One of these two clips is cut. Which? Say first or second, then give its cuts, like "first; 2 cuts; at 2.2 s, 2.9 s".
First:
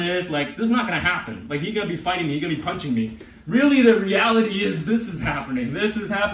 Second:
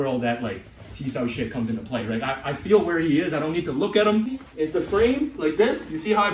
second; 1 cut; at 4.4 s